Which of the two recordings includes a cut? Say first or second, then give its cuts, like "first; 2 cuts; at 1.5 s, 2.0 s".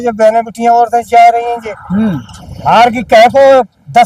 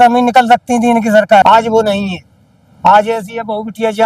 second; 1 cut; at 1.4 s